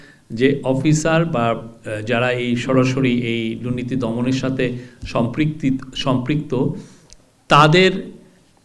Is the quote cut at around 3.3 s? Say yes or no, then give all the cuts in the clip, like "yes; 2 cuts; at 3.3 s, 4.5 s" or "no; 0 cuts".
no; 0 cuts